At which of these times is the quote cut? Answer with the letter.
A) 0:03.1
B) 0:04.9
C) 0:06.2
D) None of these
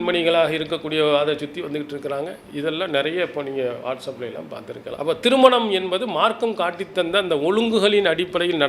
B